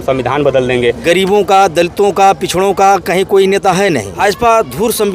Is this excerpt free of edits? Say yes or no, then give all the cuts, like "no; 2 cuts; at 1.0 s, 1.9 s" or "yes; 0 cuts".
no; 2 cuts; at 1.0 s, 4.1 s